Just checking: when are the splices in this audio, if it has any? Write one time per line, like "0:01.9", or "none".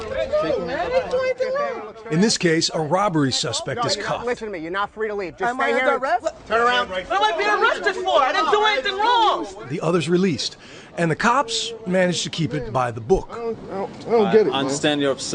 none